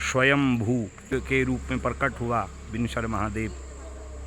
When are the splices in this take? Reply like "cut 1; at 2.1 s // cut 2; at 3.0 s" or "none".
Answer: cut 1; at 1.1 s